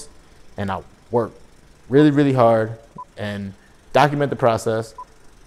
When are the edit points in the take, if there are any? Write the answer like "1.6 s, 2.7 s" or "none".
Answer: none